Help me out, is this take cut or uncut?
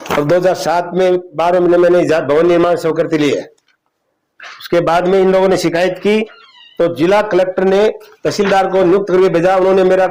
uncut